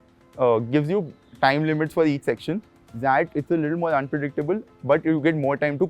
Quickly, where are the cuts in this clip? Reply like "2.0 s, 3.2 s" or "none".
2.8 s